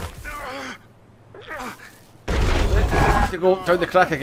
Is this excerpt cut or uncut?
uncut